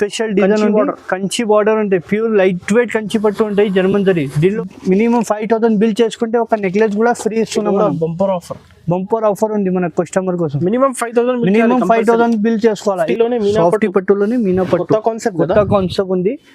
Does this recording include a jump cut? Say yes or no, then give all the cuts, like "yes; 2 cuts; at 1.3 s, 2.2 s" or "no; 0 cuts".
yes; 2 cuts; at 4.5 s, 13.1 s